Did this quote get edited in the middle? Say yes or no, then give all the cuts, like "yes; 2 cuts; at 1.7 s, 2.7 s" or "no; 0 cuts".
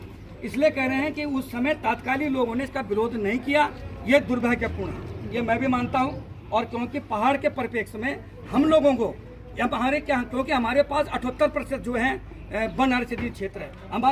no; 0 cuts